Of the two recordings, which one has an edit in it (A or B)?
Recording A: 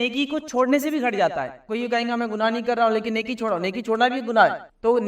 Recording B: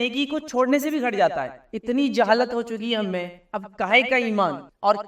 B